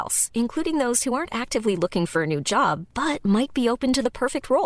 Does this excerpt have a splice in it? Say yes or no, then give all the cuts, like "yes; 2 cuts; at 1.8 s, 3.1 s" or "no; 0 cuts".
no; 0 cuts